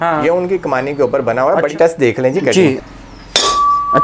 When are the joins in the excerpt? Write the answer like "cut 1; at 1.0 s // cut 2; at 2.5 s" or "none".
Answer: cut 1; at 1.7 s // cut 2; at 2.8 s